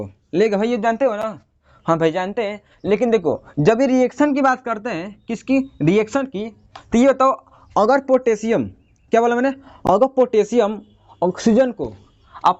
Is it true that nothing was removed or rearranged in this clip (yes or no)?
yes